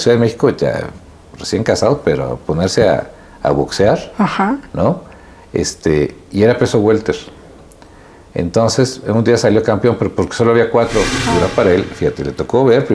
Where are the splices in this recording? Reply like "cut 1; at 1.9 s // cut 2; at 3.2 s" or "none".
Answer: cut 1; at 11.2 s